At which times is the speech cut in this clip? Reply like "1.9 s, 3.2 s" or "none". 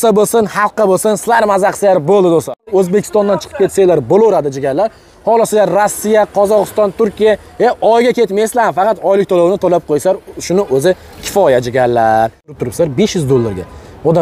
2.7 s, 12.6 s

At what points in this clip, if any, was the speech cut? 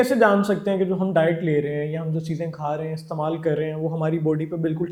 none

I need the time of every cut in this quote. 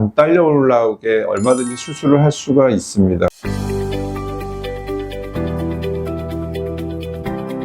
3.3 s

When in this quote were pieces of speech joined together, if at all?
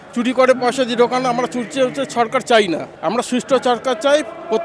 none

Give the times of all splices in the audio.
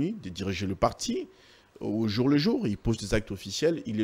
none

